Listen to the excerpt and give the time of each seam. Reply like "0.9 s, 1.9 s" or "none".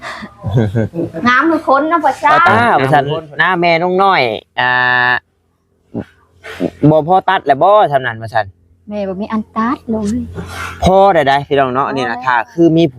2.4 s